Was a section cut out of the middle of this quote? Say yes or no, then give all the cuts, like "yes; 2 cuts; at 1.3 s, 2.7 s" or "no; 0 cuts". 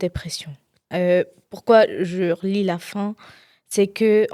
no; 0 cuts